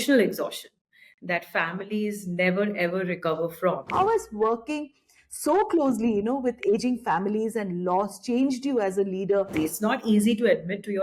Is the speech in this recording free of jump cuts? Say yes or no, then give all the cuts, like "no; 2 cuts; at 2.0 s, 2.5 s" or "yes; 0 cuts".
no; 2 cuts; at 3.9 s, 9.5 s